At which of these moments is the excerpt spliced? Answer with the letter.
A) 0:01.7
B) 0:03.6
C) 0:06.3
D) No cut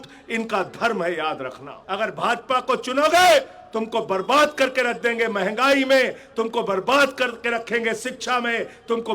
A